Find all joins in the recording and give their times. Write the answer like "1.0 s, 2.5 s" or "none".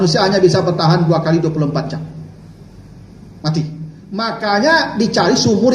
4.0 s